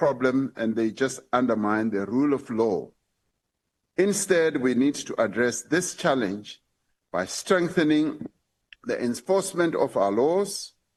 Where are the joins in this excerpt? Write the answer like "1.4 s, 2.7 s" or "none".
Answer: none

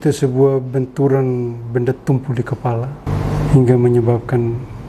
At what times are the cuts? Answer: 3.1 s

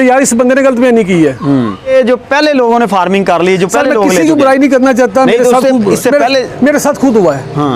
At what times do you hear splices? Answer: 1.9 s

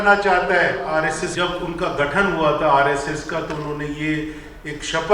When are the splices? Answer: 1.2 s

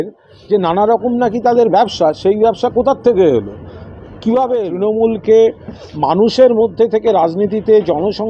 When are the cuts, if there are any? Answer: 4.7 s

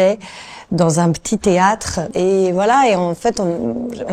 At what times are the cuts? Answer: 2.1 s

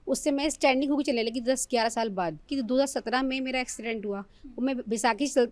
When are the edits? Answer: 2.5 s

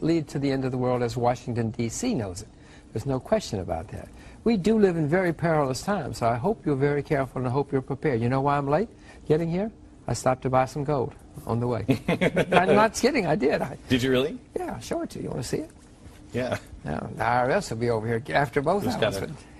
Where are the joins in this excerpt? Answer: 18.7 s

